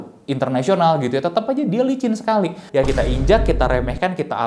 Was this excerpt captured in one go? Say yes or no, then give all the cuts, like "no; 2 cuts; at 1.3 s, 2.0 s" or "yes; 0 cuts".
no; 1 cut; at 2.6 s